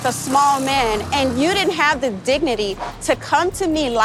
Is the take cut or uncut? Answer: uncut